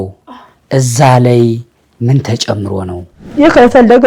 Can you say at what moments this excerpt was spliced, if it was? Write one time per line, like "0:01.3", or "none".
0:03.1